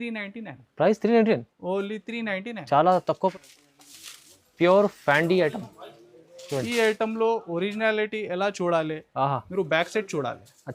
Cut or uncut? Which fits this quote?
cut